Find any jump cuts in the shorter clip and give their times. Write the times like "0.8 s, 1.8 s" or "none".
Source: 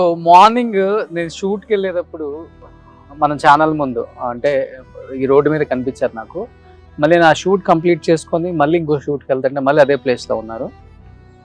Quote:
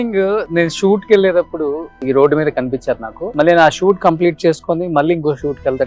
1.9 s, 3.2 s